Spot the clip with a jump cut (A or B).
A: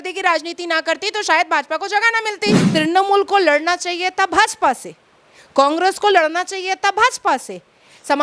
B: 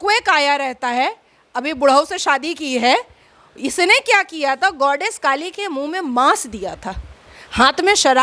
A